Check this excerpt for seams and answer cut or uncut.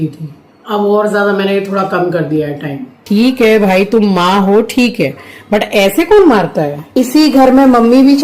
cut